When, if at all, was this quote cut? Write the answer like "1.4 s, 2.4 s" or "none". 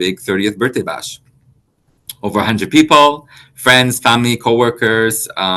none